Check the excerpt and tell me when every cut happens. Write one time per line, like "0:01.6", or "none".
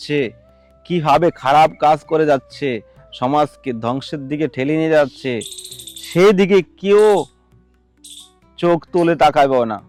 none